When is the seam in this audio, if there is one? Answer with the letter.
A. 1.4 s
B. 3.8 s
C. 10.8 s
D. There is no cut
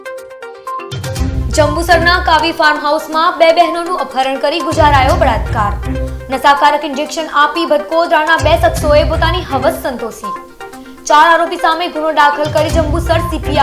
A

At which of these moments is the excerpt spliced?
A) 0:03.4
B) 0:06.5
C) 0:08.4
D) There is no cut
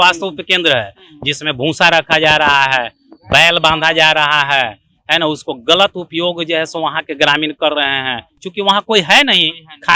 D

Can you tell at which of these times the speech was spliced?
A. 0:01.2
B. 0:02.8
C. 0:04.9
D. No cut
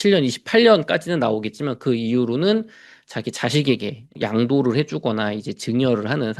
D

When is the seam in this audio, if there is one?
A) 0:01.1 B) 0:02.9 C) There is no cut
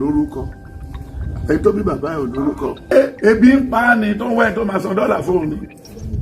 B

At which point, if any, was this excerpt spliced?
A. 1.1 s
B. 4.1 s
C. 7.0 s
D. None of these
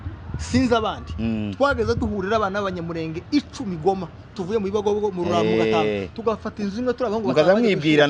D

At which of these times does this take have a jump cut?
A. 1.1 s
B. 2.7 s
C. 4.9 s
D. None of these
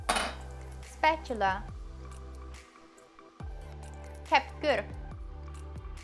D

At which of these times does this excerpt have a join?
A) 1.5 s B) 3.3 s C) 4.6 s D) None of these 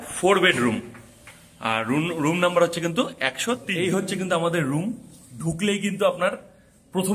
B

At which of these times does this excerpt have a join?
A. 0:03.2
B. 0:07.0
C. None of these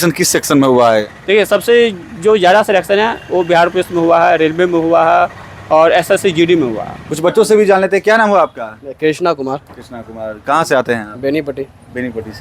C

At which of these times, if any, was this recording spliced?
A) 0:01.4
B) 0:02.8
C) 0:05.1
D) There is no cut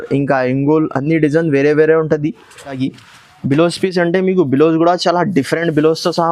B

